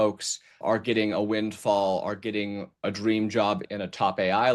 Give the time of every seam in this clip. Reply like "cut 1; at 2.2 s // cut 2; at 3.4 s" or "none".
cut 1; at 2.8 s // cut 2; at 3.6 s